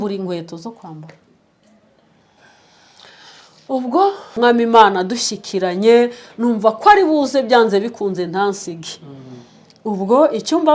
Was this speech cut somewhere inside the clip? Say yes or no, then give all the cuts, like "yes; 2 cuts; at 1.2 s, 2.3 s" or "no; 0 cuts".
yes; 1 cut; at 4.4 s